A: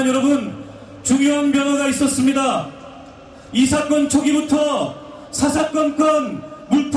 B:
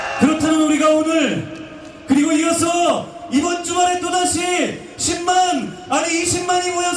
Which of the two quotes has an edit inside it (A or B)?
A